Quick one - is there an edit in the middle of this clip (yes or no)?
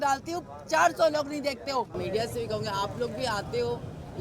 yes